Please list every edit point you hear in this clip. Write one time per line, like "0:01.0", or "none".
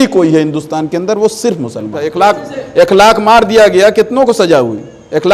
0:02.1